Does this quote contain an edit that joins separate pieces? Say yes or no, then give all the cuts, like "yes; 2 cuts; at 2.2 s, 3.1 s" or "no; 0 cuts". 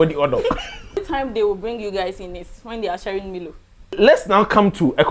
yes; 2 cuts; at 1.0 s, 4.0 s